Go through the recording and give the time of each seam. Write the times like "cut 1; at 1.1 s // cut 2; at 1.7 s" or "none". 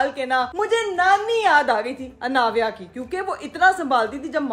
none